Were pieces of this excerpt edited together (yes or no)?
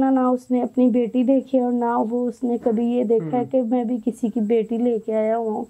no